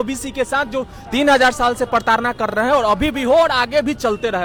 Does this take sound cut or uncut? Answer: uncut